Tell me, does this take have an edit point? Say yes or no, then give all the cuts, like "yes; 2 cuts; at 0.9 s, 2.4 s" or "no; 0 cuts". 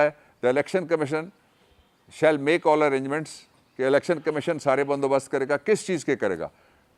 no; 0 cuts